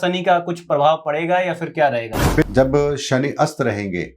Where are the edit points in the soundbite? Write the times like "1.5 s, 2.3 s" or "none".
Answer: 2.4 s

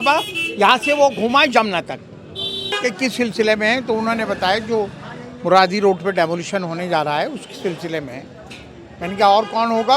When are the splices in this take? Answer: 2.7 s

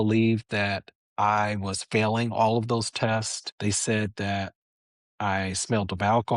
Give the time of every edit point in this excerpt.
3.4 s

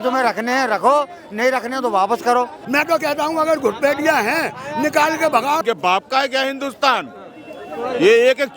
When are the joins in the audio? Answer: 2.6 s, 5.6 s

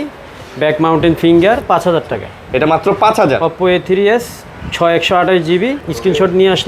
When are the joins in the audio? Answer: 1.7 s, 5.8 s

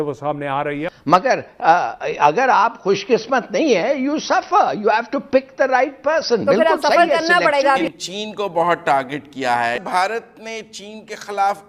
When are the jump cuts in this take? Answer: 0.8 s, 7.8 s, 9.8 s

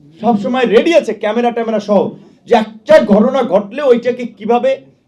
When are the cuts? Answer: none

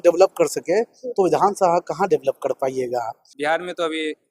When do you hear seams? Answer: 3.2 s

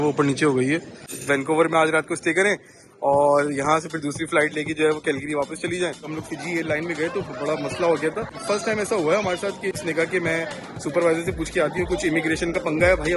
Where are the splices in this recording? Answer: 1.2 s, 6.1 s, 9.8 s

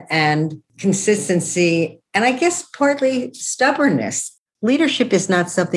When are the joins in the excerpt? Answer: 4.3 s

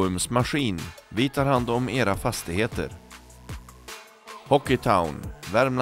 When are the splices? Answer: none

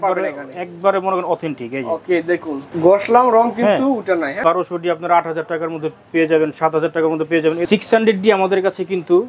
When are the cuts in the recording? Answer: 4.4 s, 7.6 s

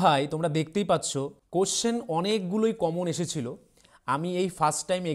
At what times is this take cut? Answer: 1.4 s

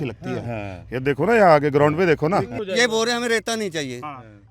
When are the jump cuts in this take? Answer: 2.6 s

